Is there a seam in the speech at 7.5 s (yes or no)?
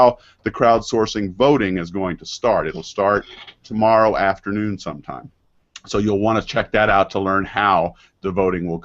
yes